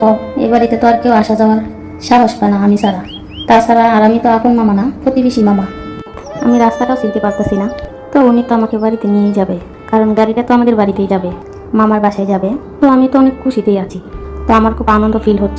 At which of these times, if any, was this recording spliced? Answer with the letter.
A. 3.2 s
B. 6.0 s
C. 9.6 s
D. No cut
B